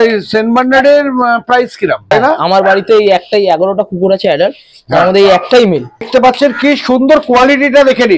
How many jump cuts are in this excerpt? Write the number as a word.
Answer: two